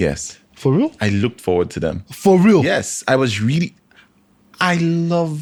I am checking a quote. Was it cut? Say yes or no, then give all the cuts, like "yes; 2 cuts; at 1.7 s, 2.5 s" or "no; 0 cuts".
no; 0 cuts